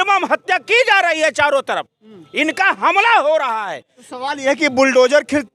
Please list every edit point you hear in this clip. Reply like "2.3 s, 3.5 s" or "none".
none